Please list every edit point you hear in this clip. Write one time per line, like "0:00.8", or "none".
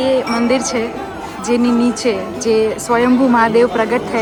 none

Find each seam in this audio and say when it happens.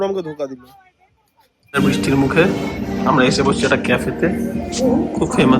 0:01.8

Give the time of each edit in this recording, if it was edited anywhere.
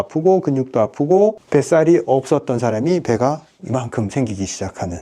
0:01.4

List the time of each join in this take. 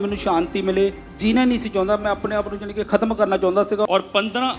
0:01.1
0:02.9
0:03.9

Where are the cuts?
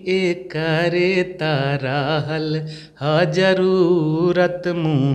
none

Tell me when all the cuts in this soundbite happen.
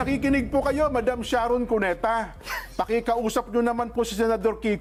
none

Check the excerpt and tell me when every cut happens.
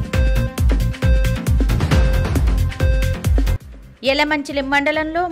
0:02.2

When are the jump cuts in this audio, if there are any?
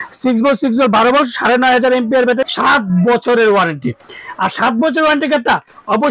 0:02.4

